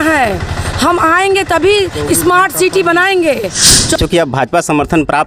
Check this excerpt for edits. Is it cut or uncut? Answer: cut